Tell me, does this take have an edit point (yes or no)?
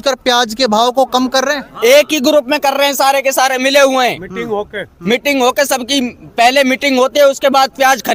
no